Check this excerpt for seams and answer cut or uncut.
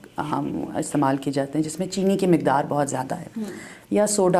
uncut